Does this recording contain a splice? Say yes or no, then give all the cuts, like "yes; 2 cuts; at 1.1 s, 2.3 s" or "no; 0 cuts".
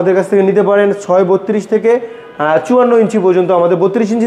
no; 0 cuts